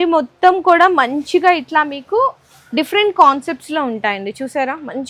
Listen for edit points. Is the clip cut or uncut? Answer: uncut